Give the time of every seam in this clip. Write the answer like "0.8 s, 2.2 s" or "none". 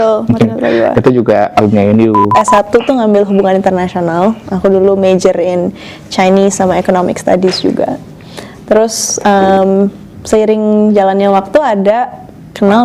2.3 s

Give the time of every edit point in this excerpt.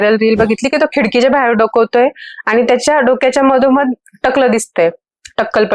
none

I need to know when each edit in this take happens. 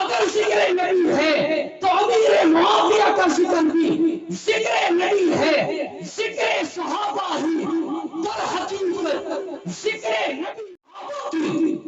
10.6 s

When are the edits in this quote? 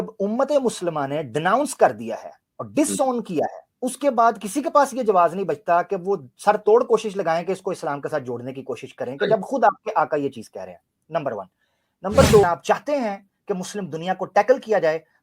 12.4 s

